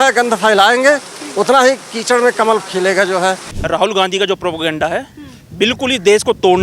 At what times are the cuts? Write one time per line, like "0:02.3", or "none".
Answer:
0:03.5